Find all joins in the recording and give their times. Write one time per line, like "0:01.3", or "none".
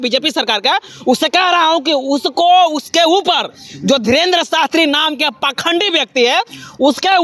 none